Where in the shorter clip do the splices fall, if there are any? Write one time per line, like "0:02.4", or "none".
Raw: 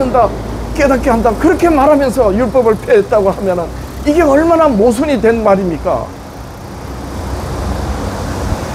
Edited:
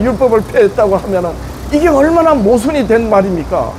none